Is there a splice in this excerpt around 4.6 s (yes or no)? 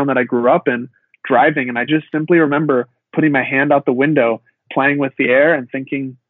yes